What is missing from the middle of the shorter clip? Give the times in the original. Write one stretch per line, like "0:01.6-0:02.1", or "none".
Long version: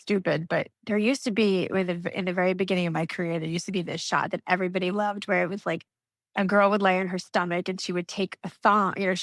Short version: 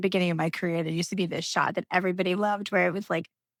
none